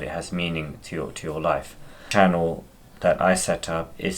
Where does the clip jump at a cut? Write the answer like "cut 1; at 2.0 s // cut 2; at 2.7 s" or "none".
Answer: cut 1; at 2.0 s